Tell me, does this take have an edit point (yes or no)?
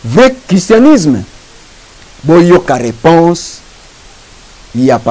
no